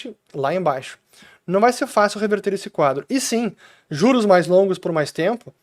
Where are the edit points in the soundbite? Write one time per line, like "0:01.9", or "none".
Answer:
none